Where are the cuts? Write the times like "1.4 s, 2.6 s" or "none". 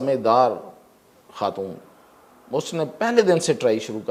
none